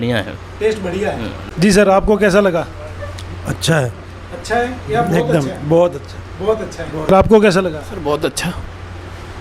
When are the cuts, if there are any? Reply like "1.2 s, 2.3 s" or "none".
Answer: 1.4 s